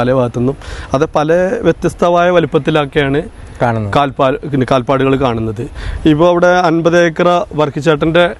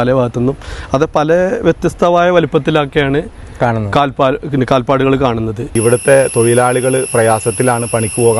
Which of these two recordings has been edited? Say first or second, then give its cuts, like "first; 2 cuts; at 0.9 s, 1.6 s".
second; 1 cut; at 5.6 s